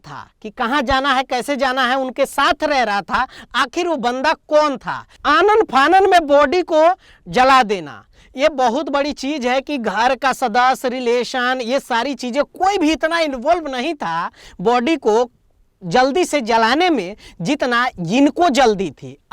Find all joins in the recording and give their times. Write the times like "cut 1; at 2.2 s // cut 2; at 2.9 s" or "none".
cut 1; at 5.2 s

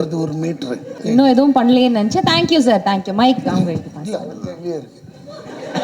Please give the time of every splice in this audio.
cut 1; at 0.9 s

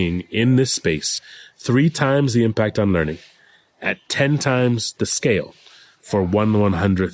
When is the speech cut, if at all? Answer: none

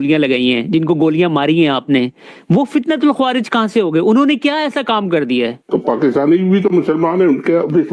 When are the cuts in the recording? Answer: cut 1; at 5.6 s

